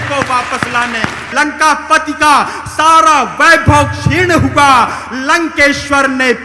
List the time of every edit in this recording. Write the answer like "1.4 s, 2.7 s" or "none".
1.3 s